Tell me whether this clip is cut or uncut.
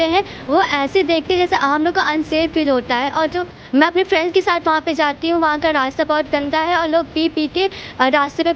uncut